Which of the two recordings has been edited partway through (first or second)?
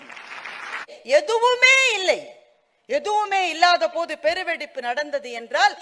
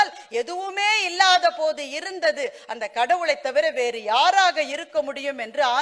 first